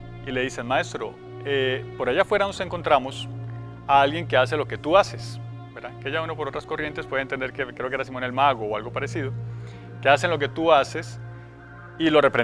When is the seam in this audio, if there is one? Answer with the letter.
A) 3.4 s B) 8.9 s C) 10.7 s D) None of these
B